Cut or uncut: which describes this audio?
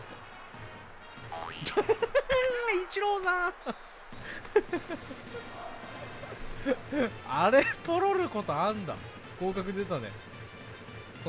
uncut